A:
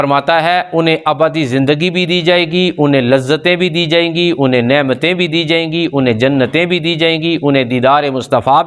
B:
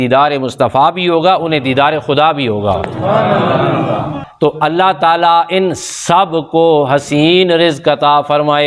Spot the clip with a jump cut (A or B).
B